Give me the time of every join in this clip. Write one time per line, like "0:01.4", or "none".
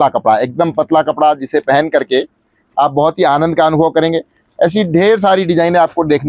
none